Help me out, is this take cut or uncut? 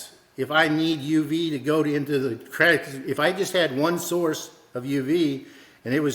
uncut